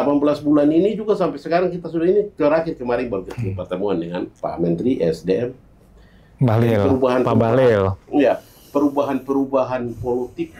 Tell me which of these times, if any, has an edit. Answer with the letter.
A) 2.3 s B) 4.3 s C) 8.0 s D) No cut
B